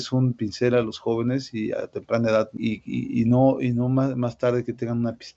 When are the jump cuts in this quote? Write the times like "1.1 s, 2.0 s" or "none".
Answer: 2.5 s